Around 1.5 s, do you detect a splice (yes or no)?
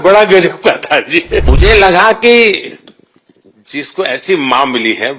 yes